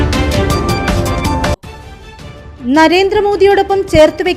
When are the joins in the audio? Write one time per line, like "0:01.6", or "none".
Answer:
0:01.6